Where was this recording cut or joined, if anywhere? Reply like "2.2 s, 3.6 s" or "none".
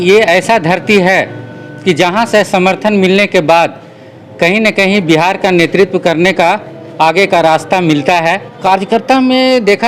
8.6 s